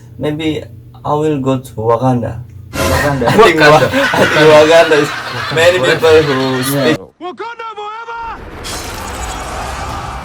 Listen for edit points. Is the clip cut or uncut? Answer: cut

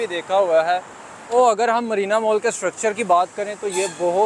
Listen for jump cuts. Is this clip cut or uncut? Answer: cut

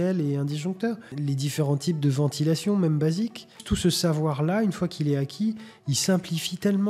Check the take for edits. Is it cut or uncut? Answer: cut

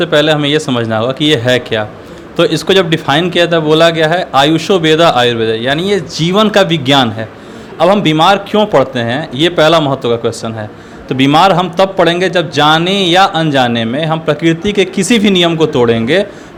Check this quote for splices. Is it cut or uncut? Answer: uncut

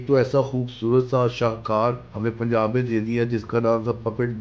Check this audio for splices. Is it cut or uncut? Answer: cut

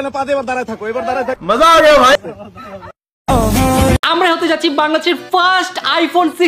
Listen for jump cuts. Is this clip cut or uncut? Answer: cut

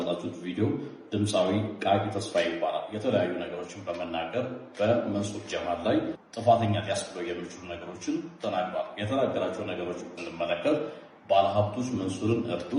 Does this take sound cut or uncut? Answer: uncut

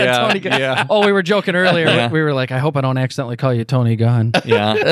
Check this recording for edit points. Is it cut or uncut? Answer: uncut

